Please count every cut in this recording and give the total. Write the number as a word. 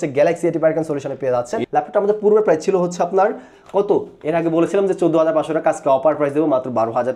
one